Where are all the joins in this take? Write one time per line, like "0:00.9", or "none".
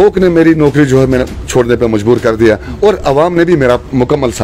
none